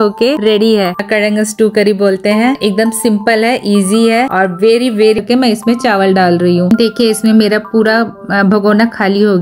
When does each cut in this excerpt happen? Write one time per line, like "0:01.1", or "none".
0:01.0
0:05.2